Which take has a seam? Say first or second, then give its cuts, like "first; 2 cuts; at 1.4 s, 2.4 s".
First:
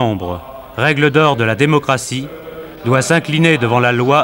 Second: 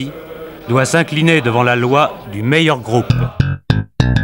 second; 1 cut; at 3.1 s